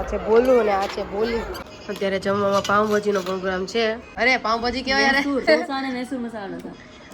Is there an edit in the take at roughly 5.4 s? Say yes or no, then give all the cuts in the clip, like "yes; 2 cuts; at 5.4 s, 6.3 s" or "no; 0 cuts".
yes; 3 cuts; at 1.7 s, 4.1 s, 5.4 s